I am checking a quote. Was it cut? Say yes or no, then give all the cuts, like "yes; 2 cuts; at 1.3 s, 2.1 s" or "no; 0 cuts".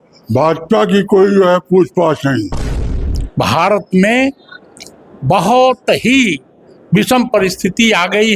yes; 1 cut; at 2.8 s